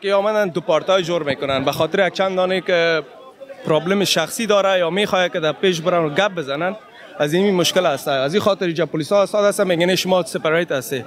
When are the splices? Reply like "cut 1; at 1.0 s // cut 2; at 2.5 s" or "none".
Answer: none